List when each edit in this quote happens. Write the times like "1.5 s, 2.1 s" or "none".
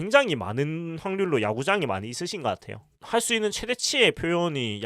2.9 s

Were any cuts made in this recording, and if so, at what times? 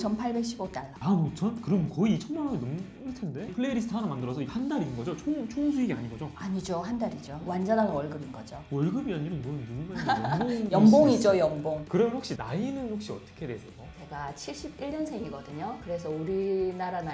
3.5 s, 7.3 s, 11.8 s

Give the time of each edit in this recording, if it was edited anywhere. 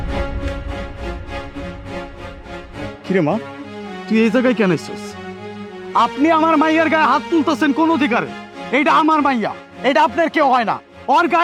none

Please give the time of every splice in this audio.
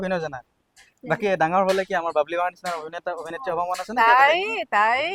none

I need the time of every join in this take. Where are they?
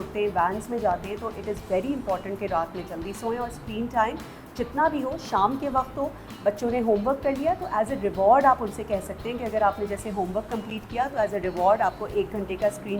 none

